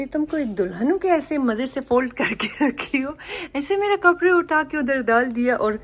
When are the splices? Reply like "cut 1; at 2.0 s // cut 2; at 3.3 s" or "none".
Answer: none